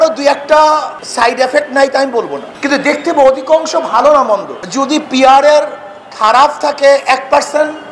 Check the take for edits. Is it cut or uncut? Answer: cut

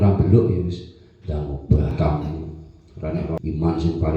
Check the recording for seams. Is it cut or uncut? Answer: cut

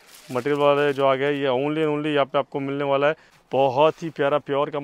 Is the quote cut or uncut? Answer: cut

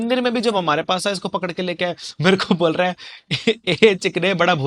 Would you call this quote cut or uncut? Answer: uncut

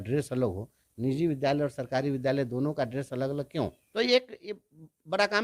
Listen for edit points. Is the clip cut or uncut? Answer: cut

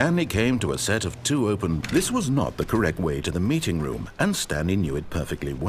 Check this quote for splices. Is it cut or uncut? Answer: cut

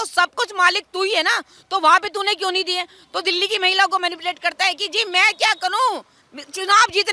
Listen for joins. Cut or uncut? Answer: uncut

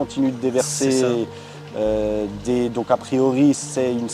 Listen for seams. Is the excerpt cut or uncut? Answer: uncut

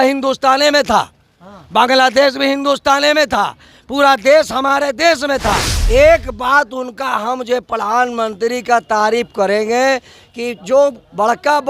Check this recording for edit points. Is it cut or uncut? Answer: cut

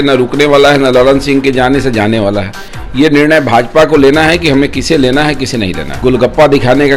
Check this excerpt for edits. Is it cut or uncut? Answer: cut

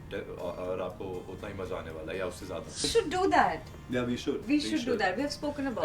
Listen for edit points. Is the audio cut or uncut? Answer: cut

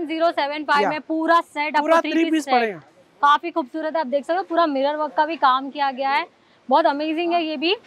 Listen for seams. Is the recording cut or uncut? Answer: uncut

